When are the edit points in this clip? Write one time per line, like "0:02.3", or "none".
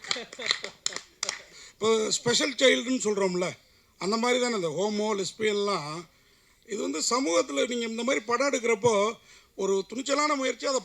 0:01.6